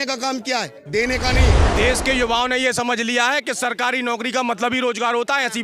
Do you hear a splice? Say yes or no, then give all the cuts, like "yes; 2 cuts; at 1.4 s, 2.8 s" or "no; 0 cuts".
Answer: yes; 1 cut; at 1.6 s